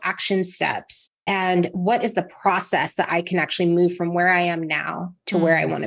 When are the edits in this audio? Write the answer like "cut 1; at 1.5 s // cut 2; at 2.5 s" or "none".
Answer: none